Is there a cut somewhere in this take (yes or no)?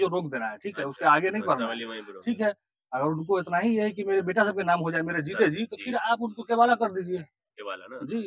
no